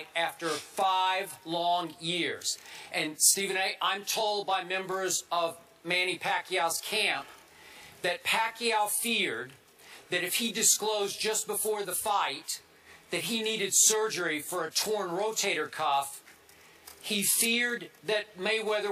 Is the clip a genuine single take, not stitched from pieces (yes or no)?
yes